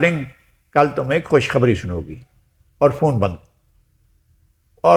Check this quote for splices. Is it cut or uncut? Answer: uncut